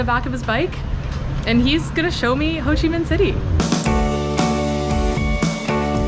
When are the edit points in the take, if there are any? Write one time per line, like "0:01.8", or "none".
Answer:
none